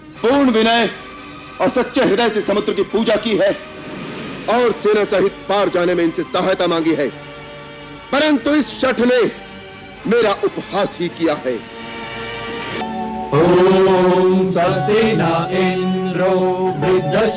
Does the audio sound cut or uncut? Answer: cut